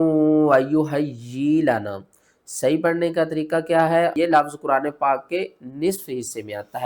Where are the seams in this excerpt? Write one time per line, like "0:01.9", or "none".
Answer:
0:04.1